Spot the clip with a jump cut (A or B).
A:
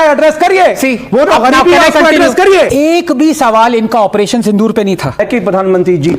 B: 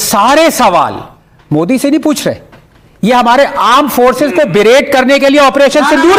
A